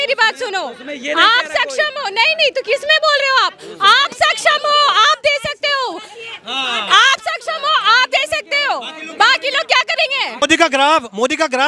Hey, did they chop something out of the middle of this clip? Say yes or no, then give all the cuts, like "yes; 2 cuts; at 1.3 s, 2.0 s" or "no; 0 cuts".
yes; 1 cut; at 10.3 s